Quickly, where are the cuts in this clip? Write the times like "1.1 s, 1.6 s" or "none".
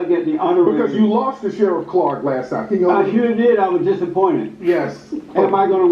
4.9 s